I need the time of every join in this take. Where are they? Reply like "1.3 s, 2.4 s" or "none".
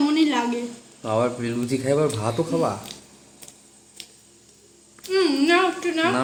none